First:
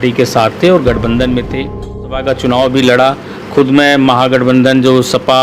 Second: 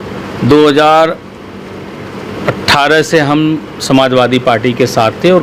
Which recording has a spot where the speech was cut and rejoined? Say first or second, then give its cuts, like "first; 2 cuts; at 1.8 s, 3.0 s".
first; 1 cut; at 2.2 s